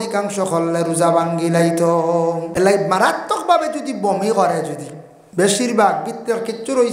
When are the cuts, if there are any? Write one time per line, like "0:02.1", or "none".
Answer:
0:02.5